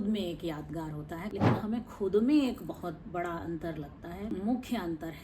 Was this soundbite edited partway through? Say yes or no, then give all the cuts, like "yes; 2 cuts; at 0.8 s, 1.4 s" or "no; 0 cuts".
yes; 2 cuts; at 1.3 s, 4.3 s